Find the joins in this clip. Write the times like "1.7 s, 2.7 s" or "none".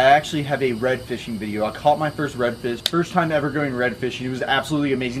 2.8 s